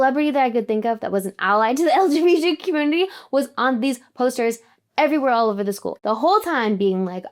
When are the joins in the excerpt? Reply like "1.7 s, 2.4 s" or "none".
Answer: 5.9 s